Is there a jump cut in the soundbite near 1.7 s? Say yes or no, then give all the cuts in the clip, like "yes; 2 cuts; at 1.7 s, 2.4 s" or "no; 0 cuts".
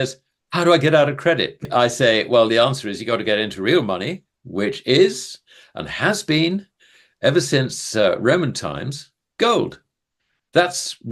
yes; 1 cut; at 1.7 s